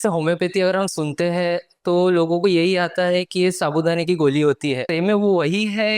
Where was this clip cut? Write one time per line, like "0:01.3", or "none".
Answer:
0:04.9